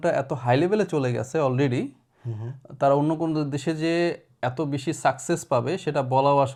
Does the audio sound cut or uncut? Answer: uncut